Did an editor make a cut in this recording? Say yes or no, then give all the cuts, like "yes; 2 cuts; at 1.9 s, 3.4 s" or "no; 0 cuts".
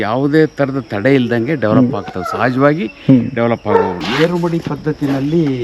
yes; 1 cut; at 4.0 s